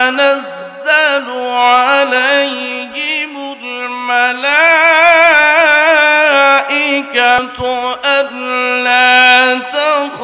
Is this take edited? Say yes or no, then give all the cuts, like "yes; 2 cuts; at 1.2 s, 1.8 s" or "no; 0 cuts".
yes; 1 cut; at 7.4 s